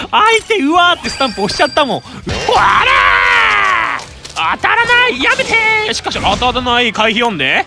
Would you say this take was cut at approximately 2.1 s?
yes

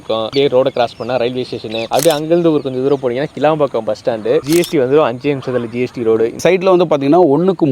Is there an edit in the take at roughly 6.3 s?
yes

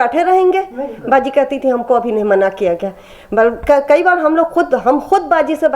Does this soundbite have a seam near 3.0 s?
no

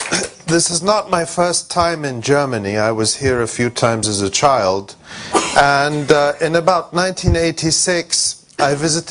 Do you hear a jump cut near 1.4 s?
yes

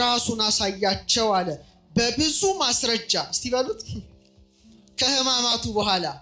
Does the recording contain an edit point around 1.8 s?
no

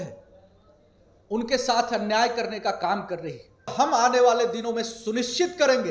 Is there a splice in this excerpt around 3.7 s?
yes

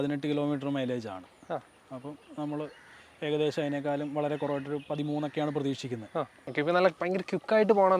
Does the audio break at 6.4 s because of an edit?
yes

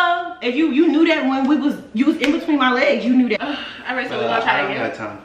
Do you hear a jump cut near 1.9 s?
no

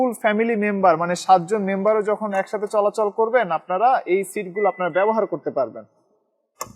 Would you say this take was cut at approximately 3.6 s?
no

